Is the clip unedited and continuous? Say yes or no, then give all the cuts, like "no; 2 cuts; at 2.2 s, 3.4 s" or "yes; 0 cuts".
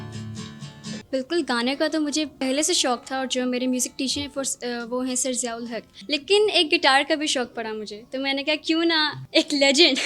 no; 4 cuts; at 1.0 s, 2.3 s, 5.9 s, 9.2 s